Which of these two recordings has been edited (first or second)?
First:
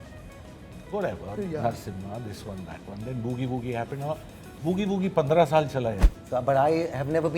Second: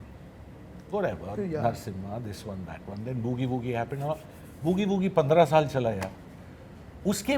first